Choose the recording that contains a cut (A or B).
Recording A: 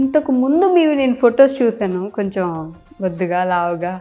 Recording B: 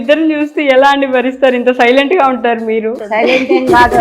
B